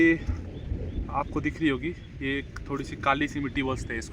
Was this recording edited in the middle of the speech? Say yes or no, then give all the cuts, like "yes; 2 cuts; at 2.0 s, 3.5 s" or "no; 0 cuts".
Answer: no; 0 cuts